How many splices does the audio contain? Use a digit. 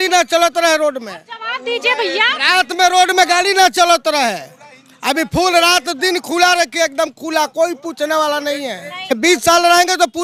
0